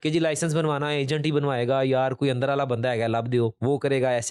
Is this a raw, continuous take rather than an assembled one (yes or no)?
yes